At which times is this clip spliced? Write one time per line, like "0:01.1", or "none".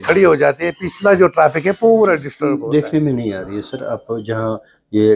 0:02.3